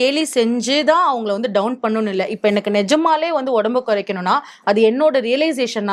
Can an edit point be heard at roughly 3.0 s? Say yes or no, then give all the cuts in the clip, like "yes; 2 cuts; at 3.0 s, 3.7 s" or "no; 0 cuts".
no; 0 cuts